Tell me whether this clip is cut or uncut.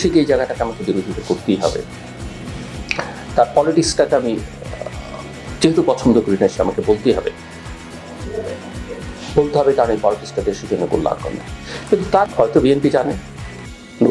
cut